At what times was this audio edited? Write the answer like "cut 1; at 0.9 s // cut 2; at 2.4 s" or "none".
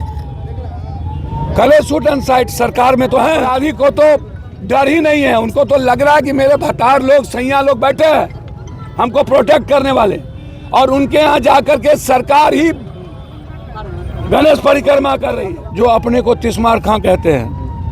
cut 1; at 3.5 s // cut 2; at 15.4 s